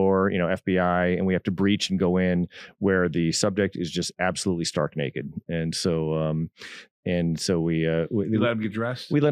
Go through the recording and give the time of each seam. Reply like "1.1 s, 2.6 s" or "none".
none